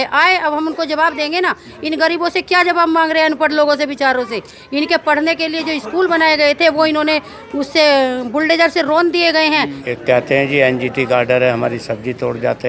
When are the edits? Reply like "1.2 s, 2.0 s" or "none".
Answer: 9.8 s